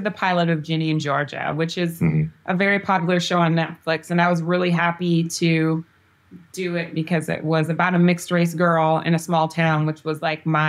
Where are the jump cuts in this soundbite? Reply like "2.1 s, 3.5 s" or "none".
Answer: none